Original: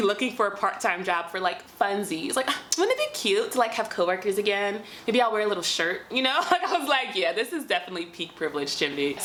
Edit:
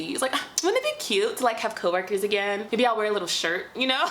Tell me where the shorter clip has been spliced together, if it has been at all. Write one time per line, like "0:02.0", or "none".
0:02.6